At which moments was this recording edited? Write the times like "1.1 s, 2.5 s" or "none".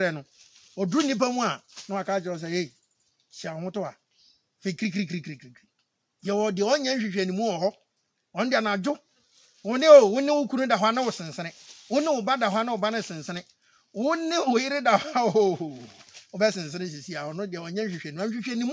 6.9 s